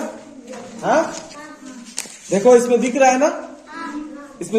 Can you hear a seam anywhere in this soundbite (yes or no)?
no